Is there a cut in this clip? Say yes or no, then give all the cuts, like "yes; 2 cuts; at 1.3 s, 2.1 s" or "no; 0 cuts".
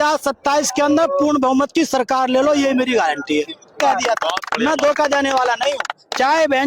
yes; 1 cut; at 3.8 s